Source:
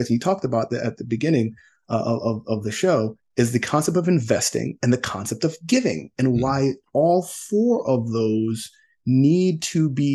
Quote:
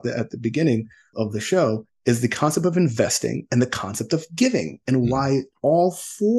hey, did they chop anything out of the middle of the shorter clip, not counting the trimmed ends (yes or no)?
yes